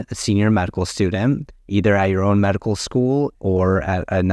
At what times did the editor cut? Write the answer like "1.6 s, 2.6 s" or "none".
1.5 s, 3.4 s